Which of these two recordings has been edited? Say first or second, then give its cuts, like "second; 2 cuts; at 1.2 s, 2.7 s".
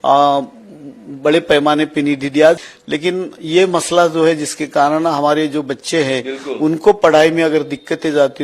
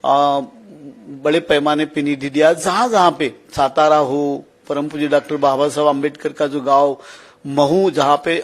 first; 1 cut; at 2.6 s